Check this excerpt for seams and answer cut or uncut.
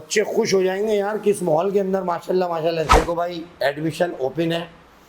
cut